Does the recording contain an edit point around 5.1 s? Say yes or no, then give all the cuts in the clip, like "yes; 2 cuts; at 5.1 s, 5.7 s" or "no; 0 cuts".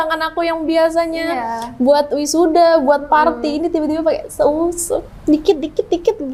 no; 0 cuts